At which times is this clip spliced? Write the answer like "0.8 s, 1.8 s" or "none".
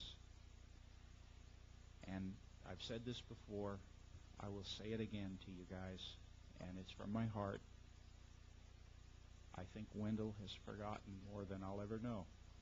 none